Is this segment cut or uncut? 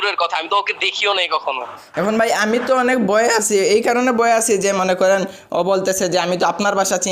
cut